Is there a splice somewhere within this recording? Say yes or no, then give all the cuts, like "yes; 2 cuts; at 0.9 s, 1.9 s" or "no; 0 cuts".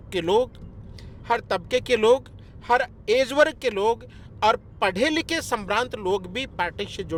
no; 0 cuts